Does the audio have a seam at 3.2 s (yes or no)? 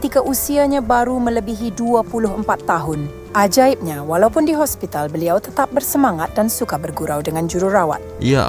yes